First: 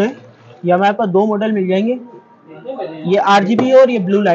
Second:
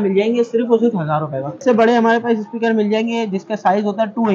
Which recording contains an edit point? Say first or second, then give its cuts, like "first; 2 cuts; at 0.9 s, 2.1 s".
second; 1 cut; at 1.5 s